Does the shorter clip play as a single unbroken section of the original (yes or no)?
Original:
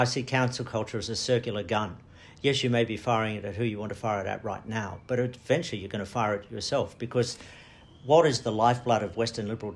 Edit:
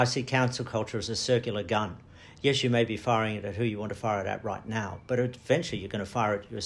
yes